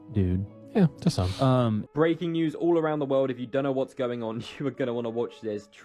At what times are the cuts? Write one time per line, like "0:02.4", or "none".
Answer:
0:01.8